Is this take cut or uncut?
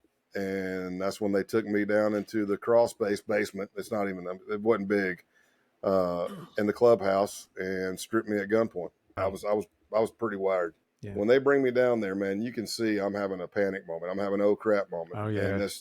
cut